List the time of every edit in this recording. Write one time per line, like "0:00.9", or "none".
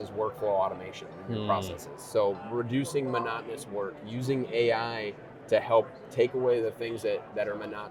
none